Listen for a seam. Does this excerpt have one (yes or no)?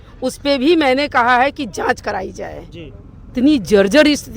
yes